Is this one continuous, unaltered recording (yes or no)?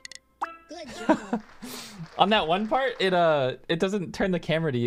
yes